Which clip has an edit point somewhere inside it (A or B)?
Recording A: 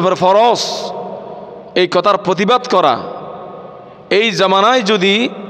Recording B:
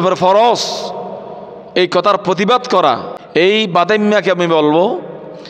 B